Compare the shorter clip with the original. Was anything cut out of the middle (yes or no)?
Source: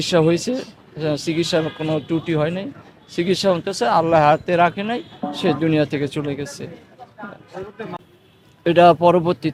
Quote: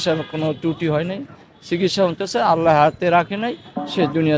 no